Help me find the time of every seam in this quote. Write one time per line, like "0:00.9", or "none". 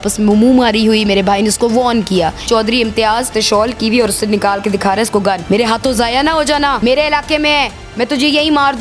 0:02.4
0:03.3
0:05.4
0:06.8